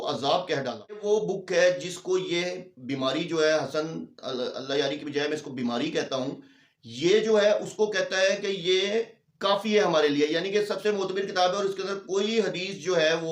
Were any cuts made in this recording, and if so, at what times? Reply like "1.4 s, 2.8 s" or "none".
1.0 s